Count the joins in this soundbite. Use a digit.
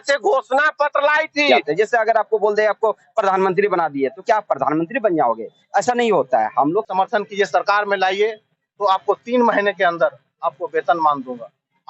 2